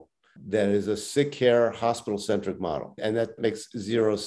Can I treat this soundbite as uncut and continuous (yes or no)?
no